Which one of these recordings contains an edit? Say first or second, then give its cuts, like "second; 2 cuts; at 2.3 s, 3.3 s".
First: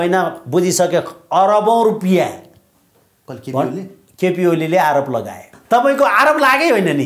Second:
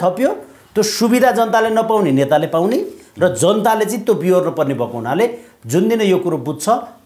first; 1 cut; at 5.5 s